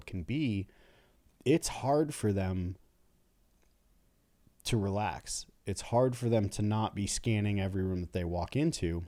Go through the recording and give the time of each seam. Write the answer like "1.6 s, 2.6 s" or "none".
none